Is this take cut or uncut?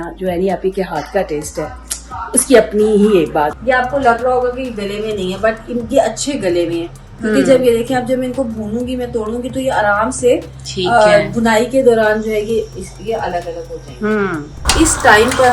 cut